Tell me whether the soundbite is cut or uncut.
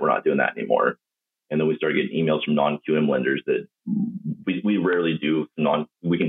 uncut